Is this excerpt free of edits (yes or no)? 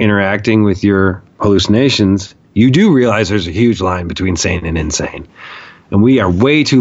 no